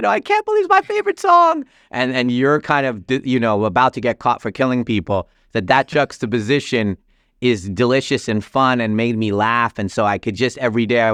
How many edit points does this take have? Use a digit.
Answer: 0